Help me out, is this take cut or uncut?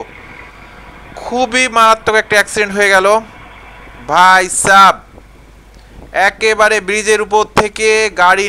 uncut